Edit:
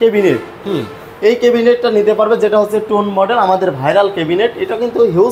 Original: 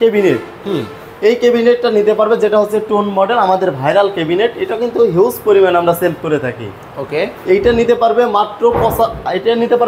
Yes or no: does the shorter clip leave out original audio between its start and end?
no